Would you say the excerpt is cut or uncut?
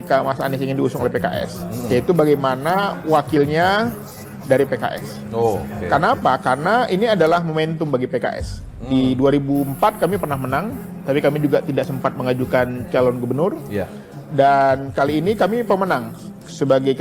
uncut